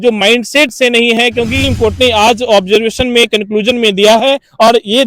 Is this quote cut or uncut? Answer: cut